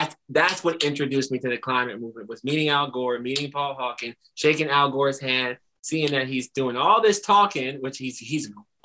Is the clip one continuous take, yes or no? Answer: yes